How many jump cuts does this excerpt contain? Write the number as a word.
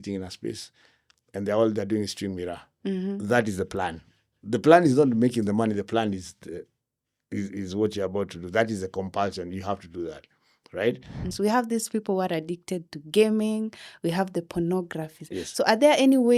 one